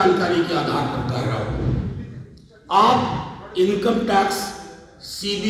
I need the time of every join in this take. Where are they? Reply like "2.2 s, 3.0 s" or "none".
none